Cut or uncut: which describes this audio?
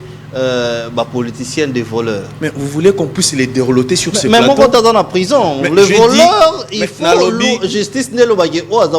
uncut